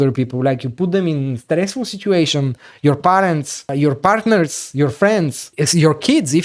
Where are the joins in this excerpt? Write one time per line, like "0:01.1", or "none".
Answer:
0:03.6
0:05.5